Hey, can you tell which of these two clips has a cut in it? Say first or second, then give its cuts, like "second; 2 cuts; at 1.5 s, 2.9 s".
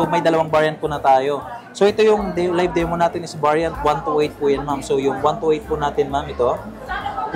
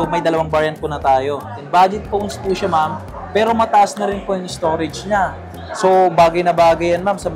second; 1 cut; at 1.6 s